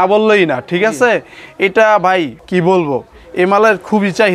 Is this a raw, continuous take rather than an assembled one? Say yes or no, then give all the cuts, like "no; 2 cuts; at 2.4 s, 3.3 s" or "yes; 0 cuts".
no; 1 cut; at 2.4 s